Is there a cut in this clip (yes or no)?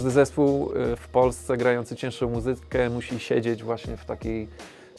no